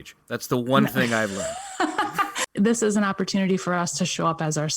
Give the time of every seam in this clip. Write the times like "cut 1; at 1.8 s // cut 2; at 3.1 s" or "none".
cut 1; at 2.4 s